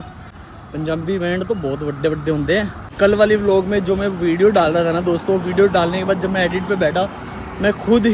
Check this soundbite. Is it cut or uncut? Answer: uncut